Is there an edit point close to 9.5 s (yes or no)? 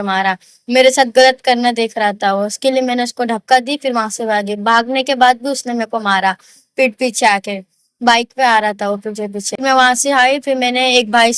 yes